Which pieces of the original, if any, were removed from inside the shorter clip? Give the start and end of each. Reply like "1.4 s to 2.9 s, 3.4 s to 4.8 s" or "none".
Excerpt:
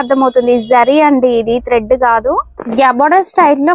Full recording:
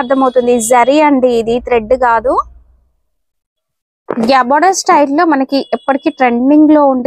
2.6 s to 4.1 s